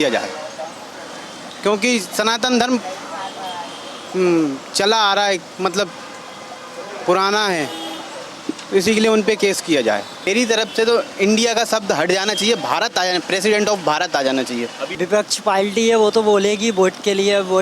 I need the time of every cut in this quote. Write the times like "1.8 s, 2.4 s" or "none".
10.2 s, 14.8 s